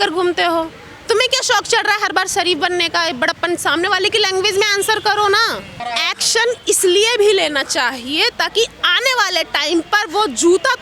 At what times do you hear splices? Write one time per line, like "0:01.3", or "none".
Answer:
0:05.8